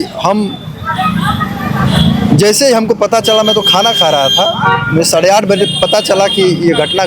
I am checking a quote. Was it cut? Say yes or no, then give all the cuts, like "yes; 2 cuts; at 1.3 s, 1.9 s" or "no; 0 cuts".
no; 0 cuts